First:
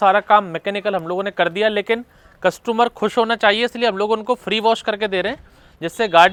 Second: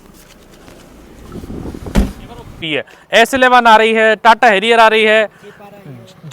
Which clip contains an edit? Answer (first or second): second